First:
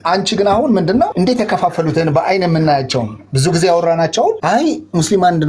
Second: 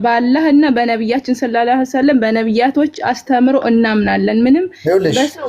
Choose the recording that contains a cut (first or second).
first